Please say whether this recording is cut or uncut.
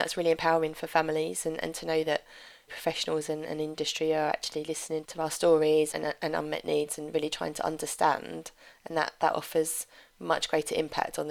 uncut